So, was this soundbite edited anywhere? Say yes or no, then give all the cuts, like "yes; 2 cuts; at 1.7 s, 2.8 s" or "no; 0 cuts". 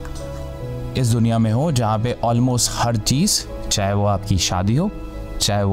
no; 0 cuts